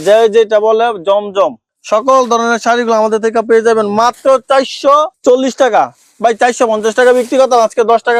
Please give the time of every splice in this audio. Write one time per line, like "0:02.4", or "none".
none